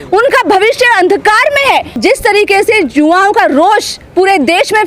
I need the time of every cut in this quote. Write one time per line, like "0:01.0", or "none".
0:02.0

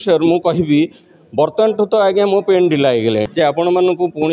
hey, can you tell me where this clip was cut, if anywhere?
0:03.3

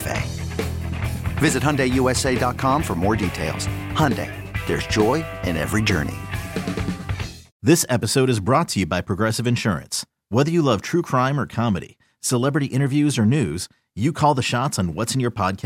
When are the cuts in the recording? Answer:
0:07.5

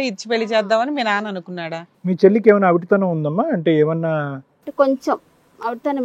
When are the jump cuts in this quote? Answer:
0:01.9

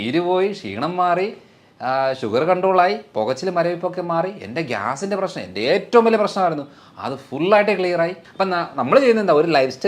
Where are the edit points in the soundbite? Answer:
0:08.2

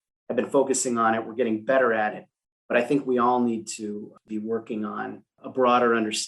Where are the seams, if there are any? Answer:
0:04.2
0:05.3

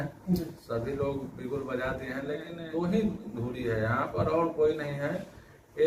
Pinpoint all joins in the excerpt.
0:02.5

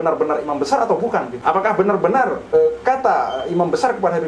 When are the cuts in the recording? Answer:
0:01.3
0:02.4

